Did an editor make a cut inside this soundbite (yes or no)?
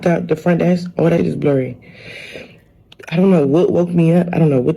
yes